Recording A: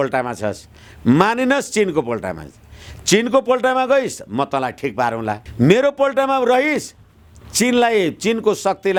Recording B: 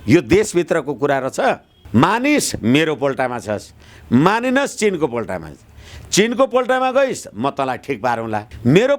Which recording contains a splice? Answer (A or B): B